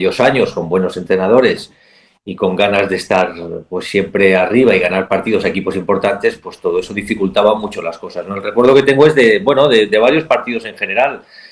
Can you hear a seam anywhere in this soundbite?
no; 0 cuts

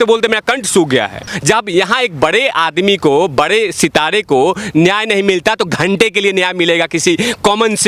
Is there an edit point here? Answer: yes; 1 cut; at 1.3 s

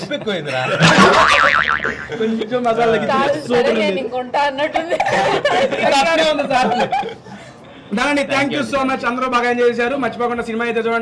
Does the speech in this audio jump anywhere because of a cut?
no; 0 cuts

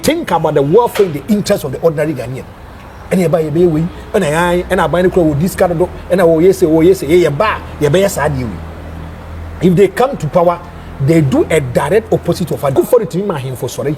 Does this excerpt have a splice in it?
yes; 1 cut; at 12.7 s

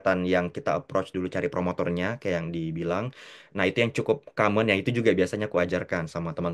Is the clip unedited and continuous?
yes; 0 cuts

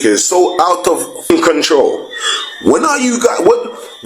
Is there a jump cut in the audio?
yes; 1 cut; at 1.2 s

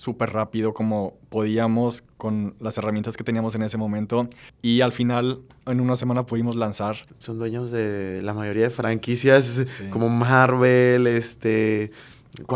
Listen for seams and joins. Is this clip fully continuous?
no; 2 cuts; at 4.5 s, 7.1 s

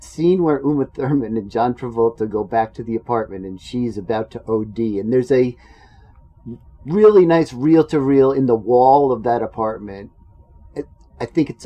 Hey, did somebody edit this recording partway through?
no; 0 cuts

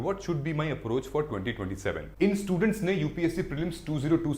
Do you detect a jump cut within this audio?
yes; 1 cut; at 2.0 s

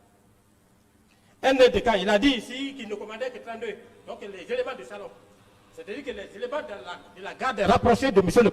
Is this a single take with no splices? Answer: no; 1 cut; at 1.1 s

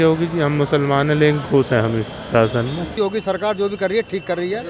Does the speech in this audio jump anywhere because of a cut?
yes; 1 cut; at 3.0 s

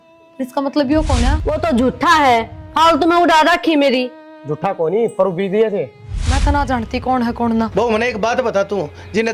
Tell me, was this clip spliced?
yes; 2 cuts; at 1.4 s, 6.1 s

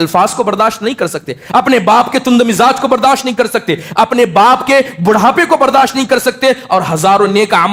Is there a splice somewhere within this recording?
no; 0 cuts

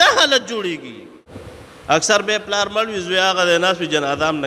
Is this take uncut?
no; 1 cut; at 1.3 s

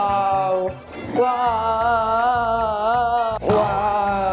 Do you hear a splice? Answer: yes; 2 cuts; at 0.9 s, 3.4 s

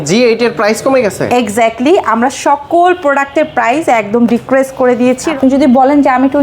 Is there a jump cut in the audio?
yes; 1 cut; at 5.3 s

